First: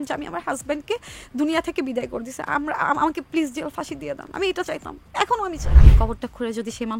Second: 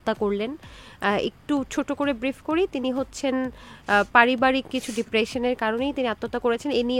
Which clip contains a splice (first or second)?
first